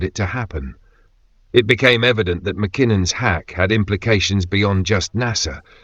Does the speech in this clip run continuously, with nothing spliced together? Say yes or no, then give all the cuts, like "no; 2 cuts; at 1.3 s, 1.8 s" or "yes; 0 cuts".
yes; 0 cuts